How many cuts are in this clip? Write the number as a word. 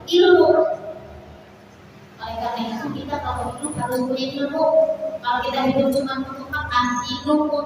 zero